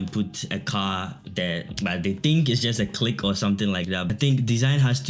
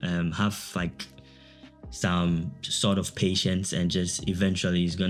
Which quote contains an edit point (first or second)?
first